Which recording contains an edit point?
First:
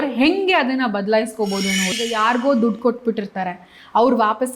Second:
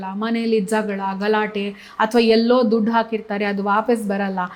first; 1 cut; at 1.9 s

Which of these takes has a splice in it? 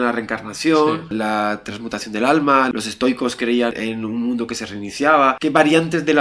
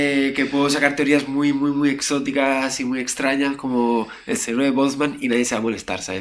first; 4 cuts; at 1.1 s, 2.7 s, 3.7 s, 5.4 s

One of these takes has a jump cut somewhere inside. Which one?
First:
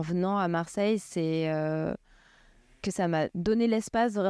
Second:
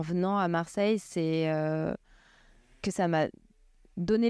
first; 1 cut; at 3.3 s

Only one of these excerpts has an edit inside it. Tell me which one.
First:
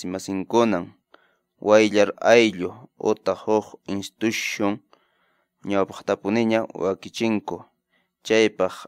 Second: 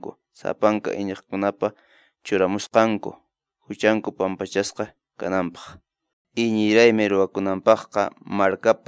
second; 1 cut; at 6.1 s

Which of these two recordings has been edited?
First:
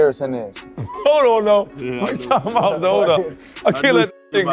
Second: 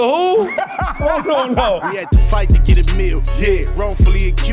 second; 1 cut; at 1.9 s

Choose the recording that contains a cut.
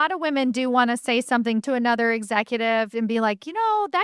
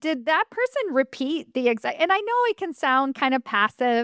first; 1 cut; at 1.6 s

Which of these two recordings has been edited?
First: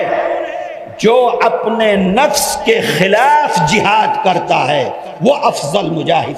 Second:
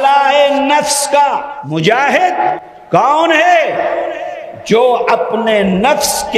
second; 2 cuts; at 1.5 s, 2.6 s

